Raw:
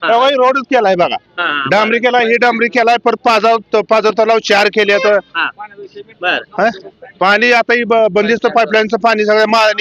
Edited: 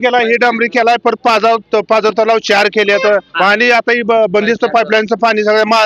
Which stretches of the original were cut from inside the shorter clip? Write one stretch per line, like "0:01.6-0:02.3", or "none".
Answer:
0:05.3-0:07.1

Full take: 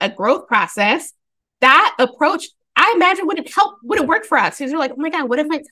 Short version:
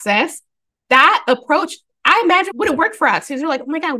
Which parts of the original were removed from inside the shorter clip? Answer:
0:03.2-0:03.8

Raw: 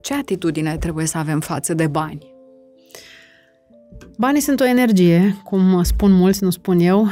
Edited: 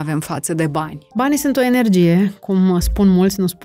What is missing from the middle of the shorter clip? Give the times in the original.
0:02.2-0:04.0

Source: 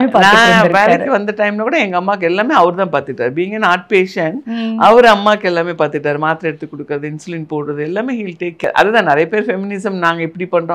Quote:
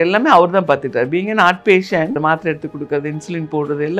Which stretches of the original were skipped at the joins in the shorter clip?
0:04.4-0:06.2

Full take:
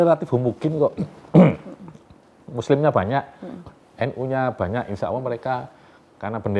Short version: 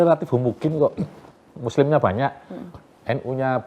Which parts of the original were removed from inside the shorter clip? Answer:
0:01.1-0:02.0

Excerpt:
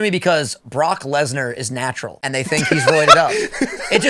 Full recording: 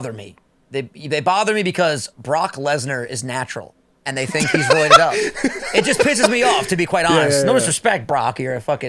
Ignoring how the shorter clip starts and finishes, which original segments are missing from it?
0:03.6-0:03.9

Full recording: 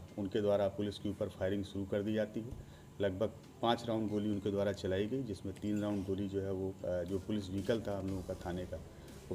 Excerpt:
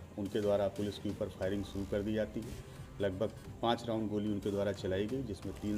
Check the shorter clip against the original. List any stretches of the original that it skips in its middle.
none

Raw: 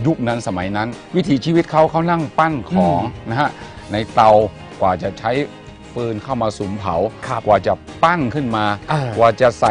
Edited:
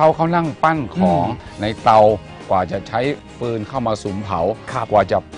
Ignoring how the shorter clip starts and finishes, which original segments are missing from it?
0:03.2-0:03.7
0:05.6-0:05.8

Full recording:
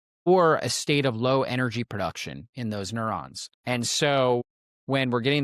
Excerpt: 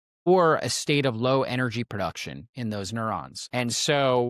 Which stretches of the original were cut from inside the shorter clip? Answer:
0:03.4-0:03.5

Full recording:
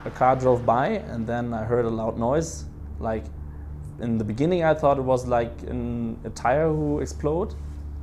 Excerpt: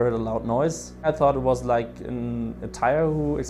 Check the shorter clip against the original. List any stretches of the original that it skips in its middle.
0:02.8-0:04.7

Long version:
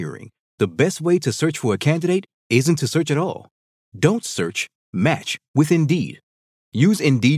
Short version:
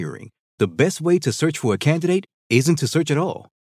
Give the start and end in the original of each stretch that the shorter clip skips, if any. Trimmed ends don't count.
none

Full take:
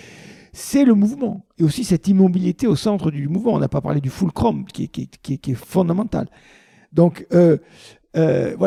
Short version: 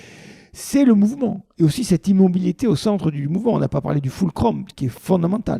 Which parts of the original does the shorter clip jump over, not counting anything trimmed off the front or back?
0:04.7-0:05.4

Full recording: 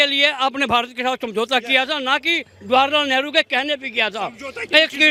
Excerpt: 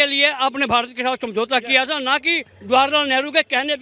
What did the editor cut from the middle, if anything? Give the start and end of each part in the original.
none

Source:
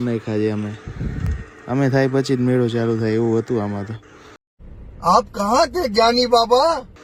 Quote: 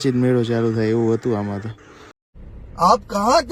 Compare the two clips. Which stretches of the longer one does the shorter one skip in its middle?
none

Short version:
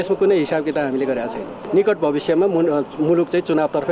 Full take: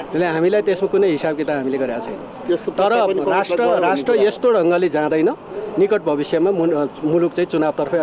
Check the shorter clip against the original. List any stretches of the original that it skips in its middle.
0:02.2-0:05.6

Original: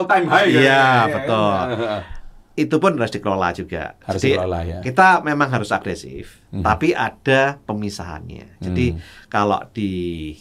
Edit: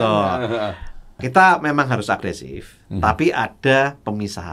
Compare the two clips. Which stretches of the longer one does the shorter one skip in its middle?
0:02.4-0:04.7

